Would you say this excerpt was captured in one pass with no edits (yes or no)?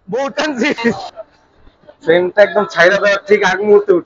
no